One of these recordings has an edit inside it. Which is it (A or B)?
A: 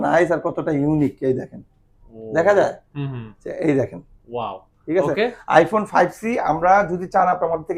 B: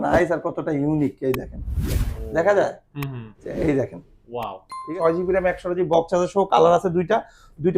B